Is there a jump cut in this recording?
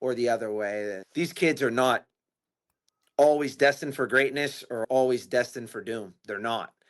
yes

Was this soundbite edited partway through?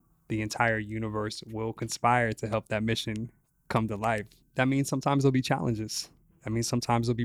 yes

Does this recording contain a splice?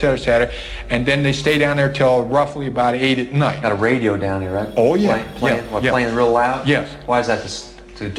yes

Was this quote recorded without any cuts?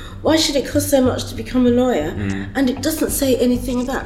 yes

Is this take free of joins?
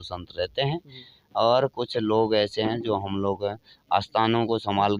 yes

